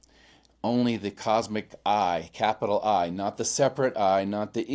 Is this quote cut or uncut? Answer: uncut